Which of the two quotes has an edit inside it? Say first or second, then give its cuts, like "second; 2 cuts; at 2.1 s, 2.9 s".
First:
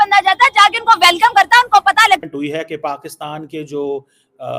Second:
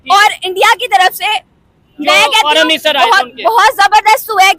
first; 1 cut; at 2.2 s